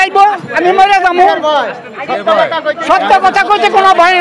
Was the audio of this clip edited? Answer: no; 0 cuts

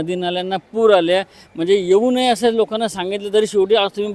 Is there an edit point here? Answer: no; 0 cuts

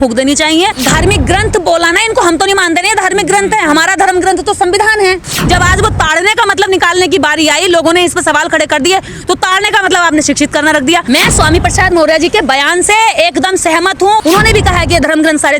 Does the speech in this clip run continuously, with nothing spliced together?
no; 4 cuts; at 0.8 s, 5.3 s, 11.0 s, 14.2 s

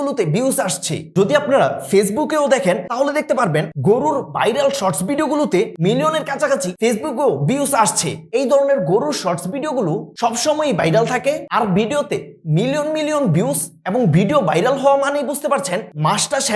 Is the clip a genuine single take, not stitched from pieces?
yes; 0 cuts

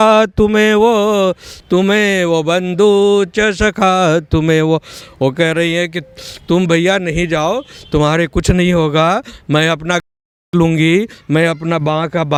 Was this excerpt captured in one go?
yes; 0 cuts

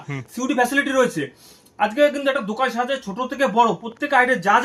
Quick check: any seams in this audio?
no; 0 cuts

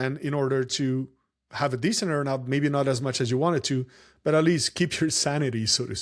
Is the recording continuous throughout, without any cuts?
yes; 0 cuts

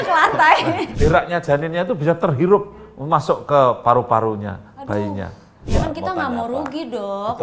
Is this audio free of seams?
no; 2 cuts; at 0.9 s, 5.6 s

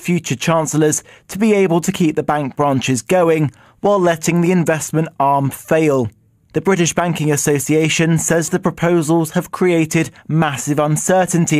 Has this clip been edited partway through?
no; 0 cuts

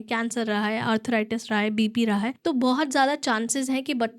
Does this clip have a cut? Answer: yes; 1 cut; at 2.4 s

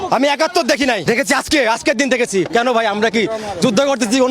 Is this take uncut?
no; 2 cuts; at 1.0 s, 2.5 s

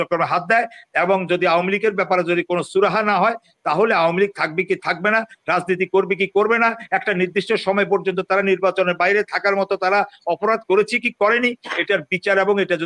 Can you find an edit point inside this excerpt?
no; 0 cuts

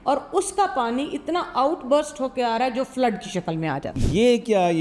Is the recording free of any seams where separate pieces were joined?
no; 1 cut; at 3.9 s

